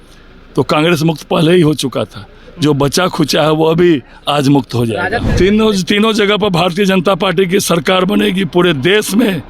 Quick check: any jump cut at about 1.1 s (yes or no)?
no